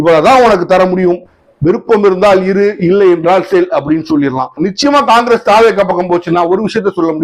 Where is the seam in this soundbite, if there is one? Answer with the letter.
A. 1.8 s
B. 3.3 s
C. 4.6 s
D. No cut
C